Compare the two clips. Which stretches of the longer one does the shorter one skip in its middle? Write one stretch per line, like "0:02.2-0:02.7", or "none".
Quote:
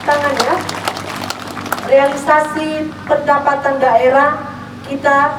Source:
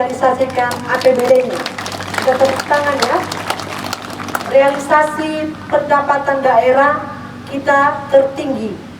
none

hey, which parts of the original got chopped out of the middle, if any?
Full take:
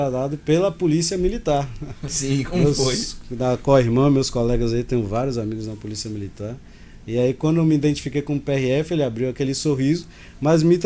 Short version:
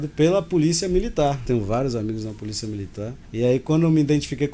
0:01.7-0:04.9
0:06.6-0:06.9

